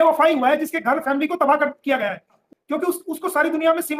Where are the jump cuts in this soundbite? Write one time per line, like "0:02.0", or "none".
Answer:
0:02.4